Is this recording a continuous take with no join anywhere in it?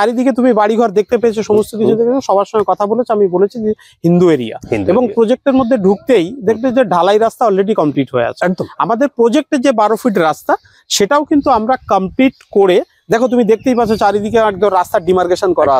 yes; 0 cuts

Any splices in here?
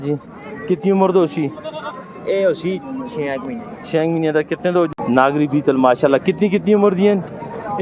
yes; 1 cut; at 5.0 s

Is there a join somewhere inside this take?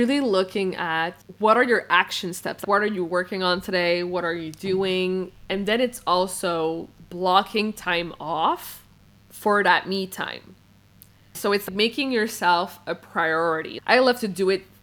yes; 4 cuts; at 1.2 s, 2.6 s, 11.5 s, 13.7 s

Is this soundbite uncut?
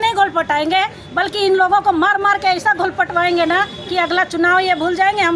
yes; 0 cuts

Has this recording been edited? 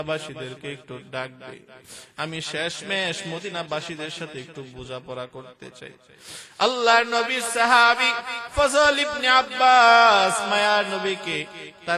no; 0 cuts

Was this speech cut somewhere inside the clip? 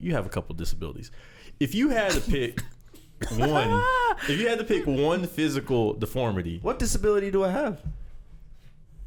no; 0 cuts

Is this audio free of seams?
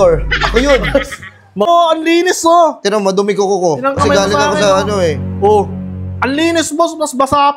no; 1 cut; at 1.7 s

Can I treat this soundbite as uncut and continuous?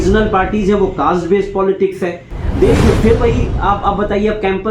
no; 1 cut; at 2.4 s

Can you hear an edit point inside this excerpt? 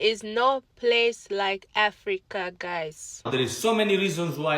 yes; 1 cut; at 3.3 s

